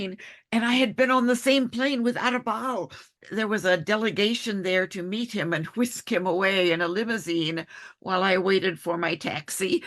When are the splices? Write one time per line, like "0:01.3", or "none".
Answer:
0:03.2